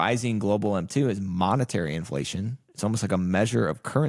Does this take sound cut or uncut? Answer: uncut